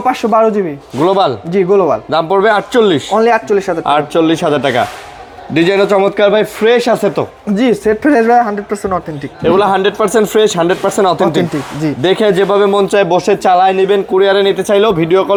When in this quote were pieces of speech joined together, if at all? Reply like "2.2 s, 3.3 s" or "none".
none